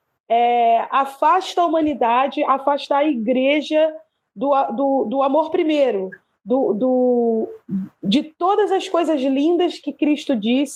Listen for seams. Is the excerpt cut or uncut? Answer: uncut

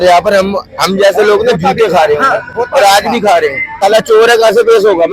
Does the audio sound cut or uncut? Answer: cut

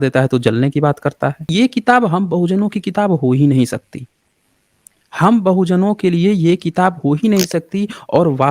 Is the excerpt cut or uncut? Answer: cut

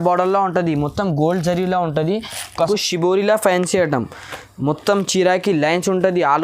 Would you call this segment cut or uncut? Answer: cut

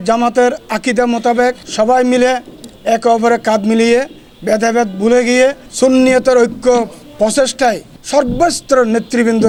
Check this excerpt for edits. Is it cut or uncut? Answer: uncut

